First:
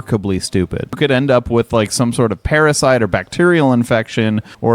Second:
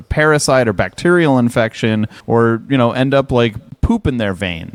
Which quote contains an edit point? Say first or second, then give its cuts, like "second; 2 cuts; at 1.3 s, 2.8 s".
first; 1 cut; at 1.0 s